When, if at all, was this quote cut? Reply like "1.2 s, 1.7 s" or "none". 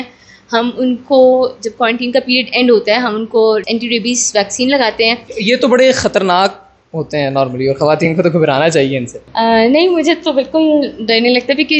3.6 s, 5.3 s, 9.2 s